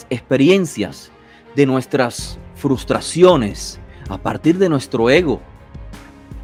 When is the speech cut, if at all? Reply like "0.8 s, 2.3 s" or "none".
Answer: none